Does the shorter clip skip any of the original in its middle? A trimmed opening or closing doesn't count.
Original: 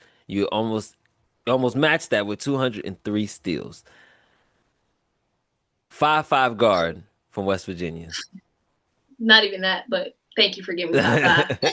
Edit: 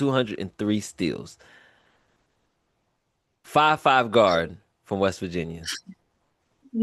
no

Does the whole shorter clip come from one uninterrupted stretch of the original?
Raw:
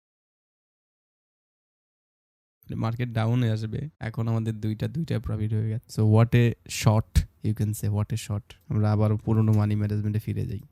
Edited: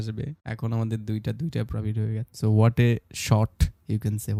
yes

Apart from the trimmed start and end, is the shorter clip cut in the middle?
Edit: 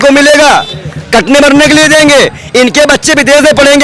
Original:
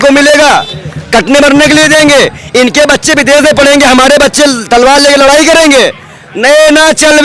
no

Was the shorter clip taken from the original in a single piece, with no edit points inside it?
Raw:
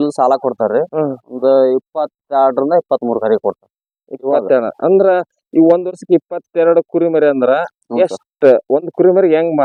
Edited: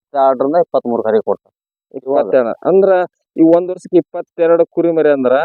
yes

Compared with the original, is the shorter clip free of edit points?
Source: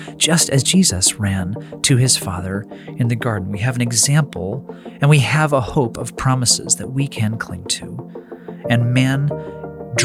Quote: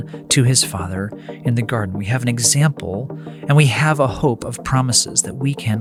yes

